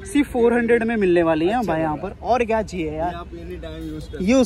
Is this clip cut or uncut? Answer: uncut